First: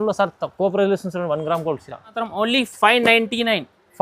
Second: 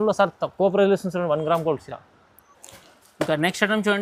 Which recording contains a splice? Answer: first; 1 cut; at 2.2 s

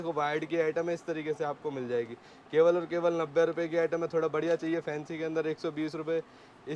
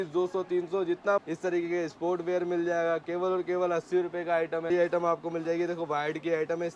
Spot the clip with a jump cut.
second; 2 cuts; at 1.2 s, 4.7 s

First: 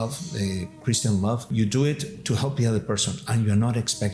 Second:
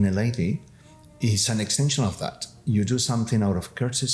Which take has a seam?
first; 1 cut; at 1.5 s

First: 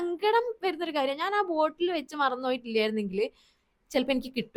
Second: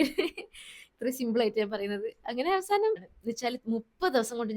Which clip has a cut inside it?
second; 1 cut; at 3.0 s

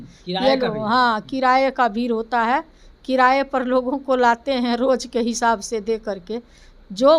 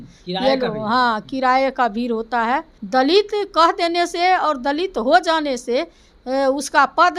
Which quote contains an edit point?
second; 1 cut; at 2.7 s

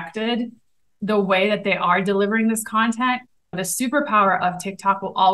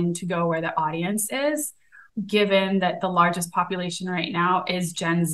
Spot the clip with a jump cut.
second; 1 cut; at 2.1 s

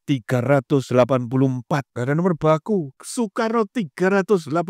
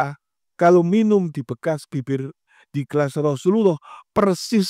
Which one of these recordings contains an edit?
first; 2 cuts; at 1.9 s, 3.0 s

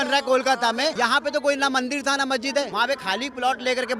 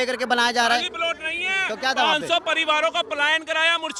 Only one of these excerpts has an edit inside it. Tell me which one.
first; 2 cuts; at 0.9 s, 2.7 s

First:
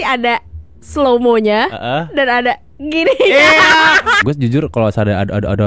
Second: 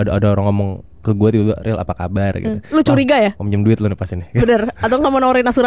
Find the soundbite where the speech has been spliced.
first; 1 cut; at 4.1 s

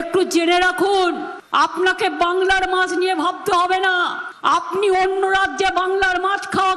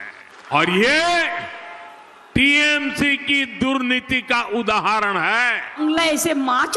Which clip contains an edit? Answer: second; 1 cut; at 5.8 s

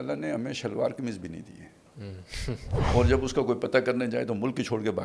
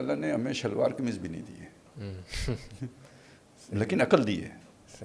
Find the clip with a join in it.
first; 1 cut; at 2.7 s

